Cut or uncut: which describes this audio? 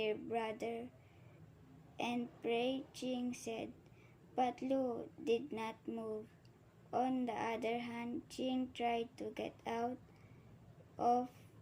uncut